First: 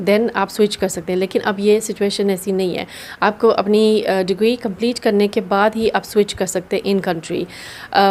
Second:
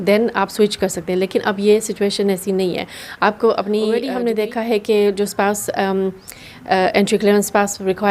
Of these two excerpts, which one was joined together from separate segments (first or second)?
second